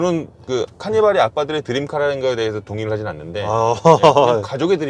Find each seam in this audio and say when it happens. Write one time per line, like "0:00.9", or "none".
none

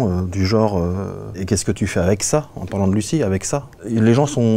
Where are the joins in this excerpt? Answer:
0:01.4
0:03.8

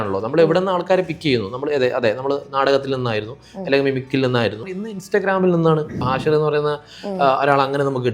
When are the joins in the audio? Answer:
0:04.7
0:06.0

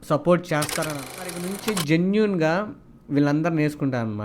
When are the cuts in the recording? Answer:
0:01.3

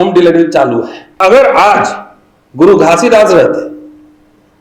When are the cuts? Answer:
0:01.2

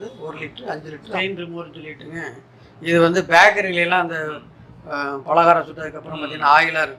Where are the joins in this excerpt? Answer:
0:01.0

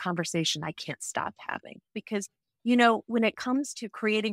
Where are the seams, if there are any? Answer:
0:02.0

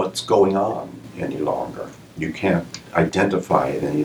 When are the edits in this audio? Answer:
none

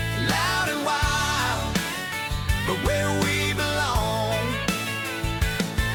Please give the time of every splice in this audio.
none

